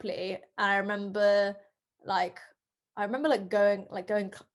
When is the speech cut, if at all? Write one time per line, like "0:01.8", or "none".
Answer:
none